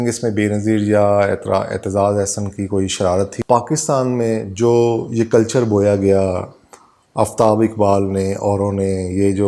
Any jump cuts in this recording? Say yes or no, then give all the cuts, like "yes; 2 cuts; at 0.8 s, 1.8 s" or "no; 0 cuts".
yes; 1 cut; at 3.3 s